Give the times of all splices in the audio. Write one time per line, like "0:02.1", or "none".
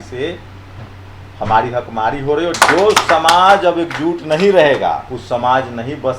0:02.5
0:05.1